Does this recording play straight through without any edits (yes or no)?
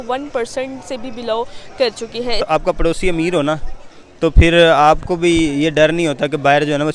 no